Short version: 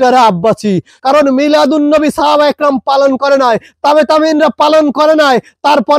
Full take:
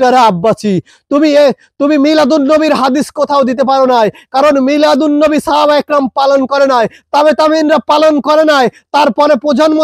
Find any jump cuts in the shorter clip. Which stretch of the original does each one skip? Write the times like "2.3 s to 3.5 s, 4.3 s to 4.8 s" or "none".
0.9 s to 4.2 s